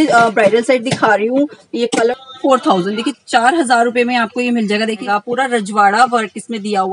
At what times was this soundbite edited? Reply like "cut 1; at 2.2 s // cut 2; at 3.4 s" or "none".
cut 1; at 2.1 s // cut 2; at 5.0 s